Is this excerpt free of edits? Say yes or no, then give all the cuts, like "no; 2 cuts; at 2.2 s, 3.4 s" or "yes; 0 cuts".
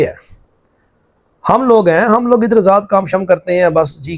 yes; 0 cuts